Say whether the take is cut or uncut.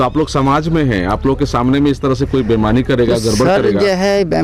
uncut